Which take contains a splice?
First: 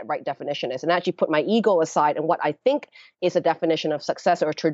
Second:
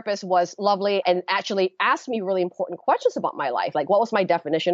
second; 1 cut; at 1.0 s

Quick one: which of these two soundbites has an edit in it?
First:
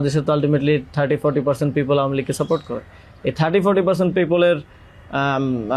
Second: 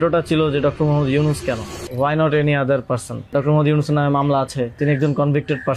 second; 3 cuts; at 1.8 s, 3.3 s, 4.8 s

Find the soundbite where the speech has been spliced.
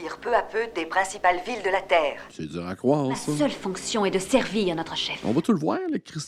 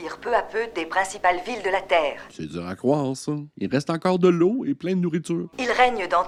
first; 2 cuts; at 3.4 s, 5.1 s

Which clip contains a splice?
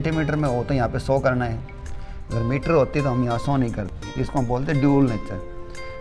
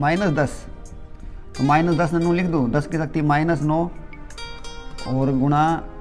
first; 1 cut; at 4.0 s

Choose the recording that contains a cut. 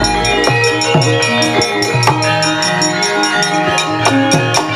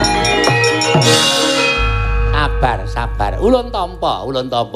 second; 1 cut; at 1.1 s

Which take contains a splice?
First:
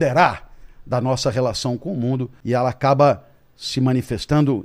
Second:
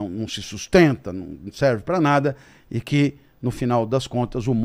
first; 1 cut; at 2.3 s

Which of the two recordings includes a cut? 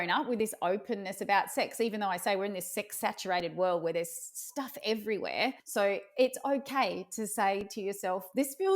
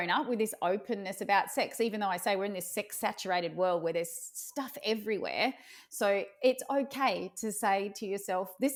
first; 1 cut; at 5.6 s

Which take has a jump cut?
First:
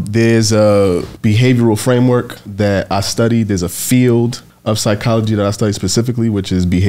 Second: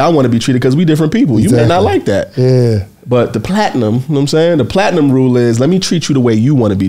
first; 3 cuts; at 1.1 s, 2.4 s, 4.5 s

